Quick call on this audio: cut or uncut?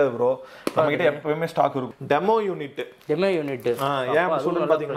cut